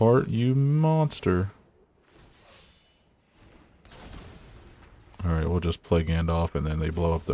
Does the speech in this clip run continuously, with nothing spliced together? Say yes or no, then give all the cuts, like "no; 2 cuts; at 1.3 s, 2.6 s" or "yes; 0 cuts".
yes; 0 cuts